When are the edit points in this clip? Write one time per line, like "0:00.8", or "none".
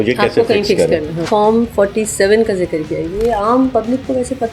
0:01.2